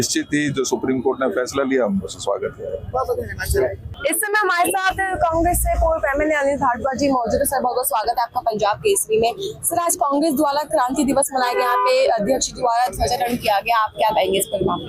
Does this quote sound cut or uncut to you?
uncut